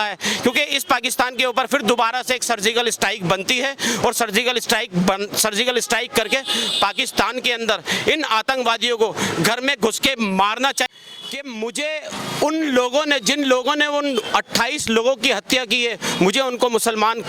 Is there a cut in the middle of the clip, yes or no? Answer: yes